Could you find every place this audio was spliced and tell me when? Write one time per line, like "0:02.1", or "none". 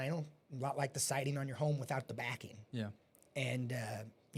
none

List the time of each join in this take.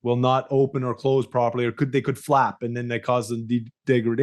none

